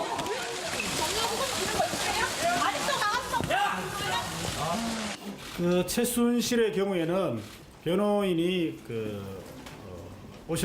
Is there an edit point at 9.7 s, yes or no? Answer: yes